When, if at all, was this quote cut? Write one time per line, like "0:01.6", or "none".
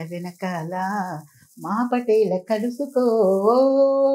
none